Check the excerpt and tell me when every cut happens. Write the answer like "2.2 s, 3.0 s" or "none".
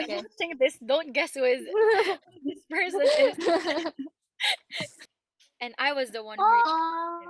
5.0 s